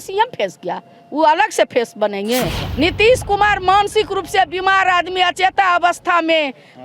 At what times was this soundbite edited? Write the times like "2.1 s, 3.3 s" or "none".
2.6 s